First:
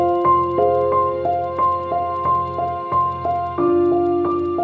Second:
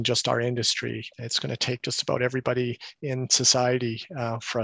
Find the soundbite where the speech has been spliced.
second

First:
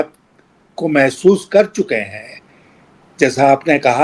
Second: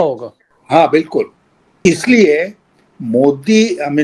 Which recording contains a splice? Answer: second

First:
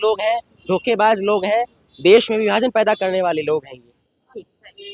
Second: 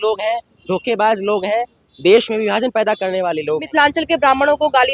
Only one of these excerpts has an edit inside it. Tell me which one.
second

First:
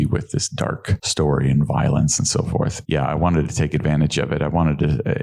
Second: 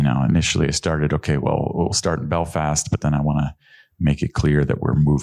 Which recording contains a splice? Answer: first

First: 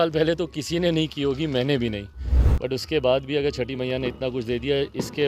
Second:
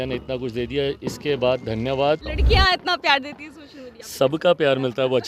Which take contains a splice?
second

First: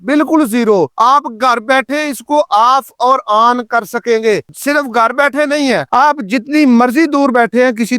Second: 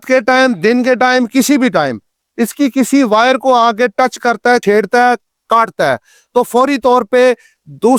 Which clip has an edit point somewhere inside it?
first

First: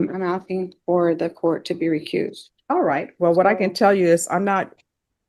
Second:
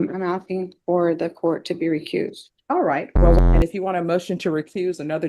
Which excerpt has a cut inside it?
second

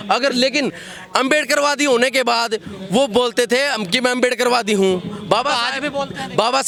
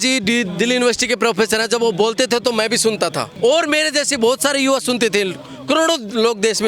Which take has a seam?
second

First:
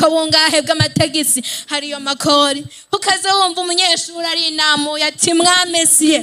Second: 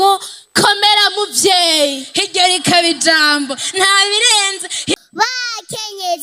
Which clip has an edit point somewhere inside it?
second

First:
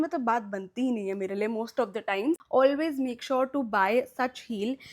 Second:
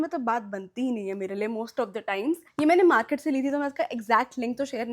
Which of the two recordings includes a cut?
first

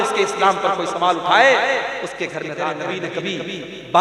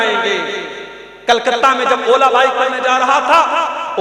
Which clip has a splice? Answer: first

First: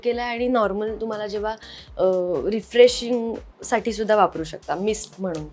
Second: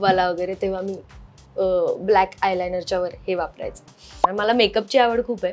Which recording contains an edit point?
second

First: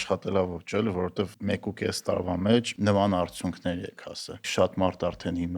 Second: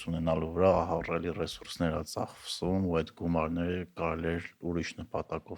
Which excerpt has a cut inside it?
first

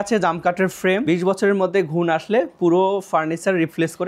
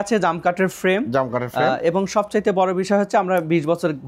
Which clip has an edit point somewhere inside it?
first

